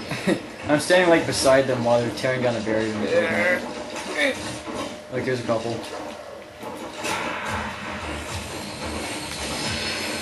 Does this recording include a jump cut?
yes; 1 cut; at 2.5 s

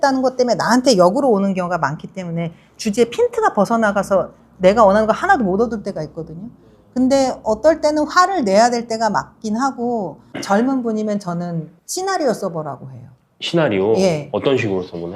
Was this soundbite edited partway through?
yes; 1 cut; at 10.2 s

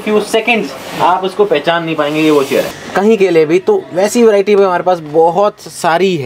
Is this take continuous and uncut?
no; 1 cut; at 2.8 s

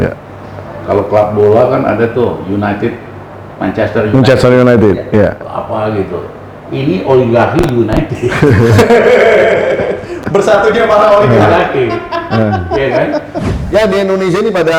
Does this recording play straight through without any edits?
no; 1 cut; at 13.4 s

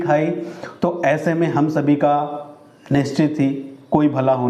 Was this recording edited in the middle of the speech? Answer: no; 0 cuts

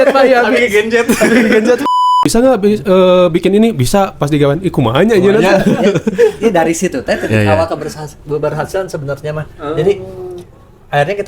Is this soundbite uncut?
no; 1 cut; at 2.0 s

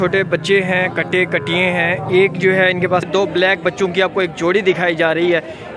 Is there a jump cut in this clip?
yes; 1 cut; at 3.1 s

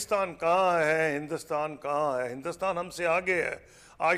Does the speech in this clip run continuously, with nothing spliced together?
yes; 0 cuts

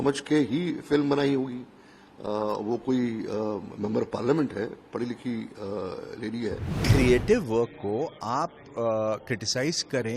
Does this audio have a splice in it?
yes; 1 cut; at 6.7 s

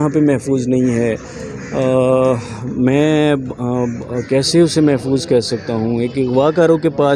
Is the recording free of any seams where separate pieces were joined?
yes; 0 cuts

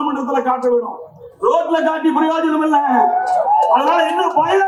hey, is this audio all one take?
yes; 0 cuts

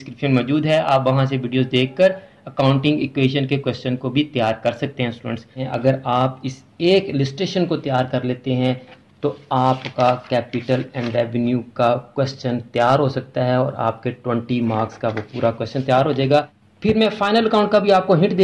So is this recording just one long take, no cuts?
no; 2 cuts; at 5.7 s, 16.4 s

